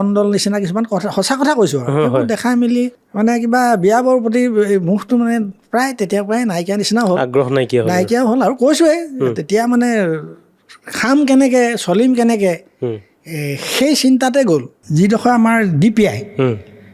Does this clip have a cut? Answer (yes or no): yes